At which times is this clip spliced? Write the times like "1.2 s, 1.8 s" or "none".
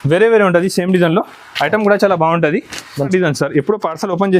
3.1 s